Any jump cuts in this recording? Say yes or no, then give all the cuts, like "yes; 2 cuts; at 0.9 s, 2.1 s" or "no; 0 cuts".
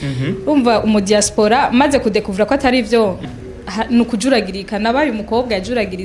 yes; 1 cut; at 3.3 s